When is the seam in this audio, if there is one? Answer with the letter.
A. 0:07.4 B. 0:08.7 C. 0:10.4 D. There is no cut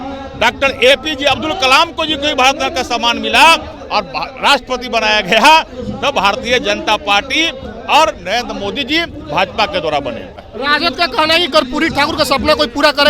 C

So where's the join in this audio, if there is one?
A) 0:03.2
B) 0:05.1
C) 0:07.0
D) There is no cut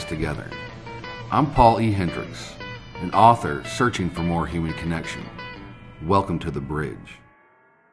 C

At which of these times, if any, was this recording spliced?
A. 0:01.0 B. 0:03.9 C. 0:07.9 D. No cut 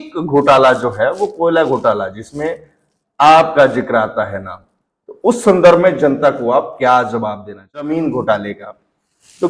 C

